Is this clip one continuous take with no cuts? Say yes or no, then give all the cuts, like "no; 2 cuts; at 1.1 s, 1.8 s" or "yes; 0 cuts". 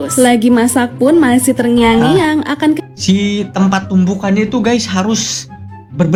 yes; 0 cuts